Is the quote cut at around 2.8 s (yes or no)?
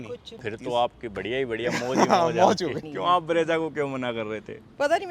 yes